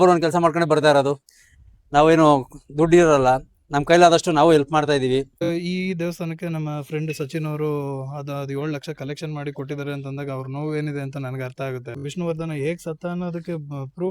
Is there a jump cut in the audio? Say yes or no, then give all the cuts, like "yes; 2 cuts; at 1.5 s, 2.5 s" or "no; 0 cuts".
yes; 2 cuts; at 5.5 s, 12.0 s